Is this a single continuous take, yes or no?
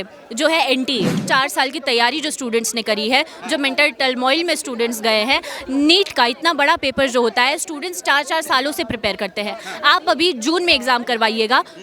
no